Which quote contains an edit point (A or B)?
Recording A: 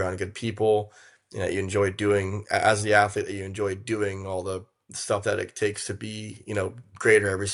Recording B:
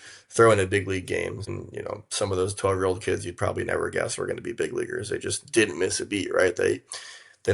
B